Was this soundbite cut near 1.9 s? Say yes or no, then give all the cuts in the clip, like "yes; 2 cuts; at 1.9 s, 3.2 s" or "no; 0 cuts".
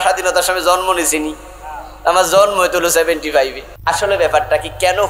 no; 1 cut; at 3.7 s